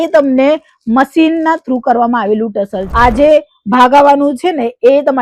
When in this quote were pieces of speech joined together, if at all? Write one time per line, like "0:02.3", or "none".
0:02.8